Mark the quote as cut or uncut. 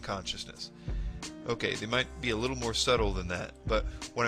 cut